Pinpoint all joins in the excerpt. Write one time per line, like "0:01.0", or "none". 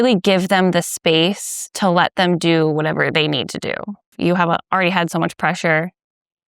0:04.1